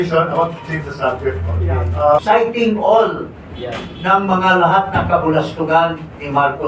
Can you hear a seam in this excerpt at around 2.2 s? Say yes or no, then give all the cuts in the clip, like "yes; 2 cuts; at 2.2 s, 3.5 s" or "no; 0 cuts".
yes; 1 cut; at 2.2 s